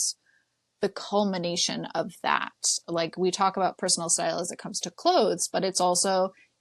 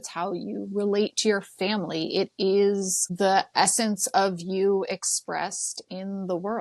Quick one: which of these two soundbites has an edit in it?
second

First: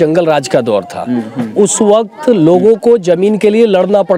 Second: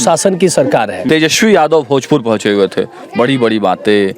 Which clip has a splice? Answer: second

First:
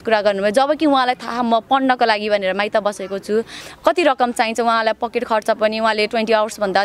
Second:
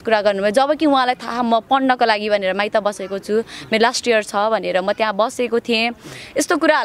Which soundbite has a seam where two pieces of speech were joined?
first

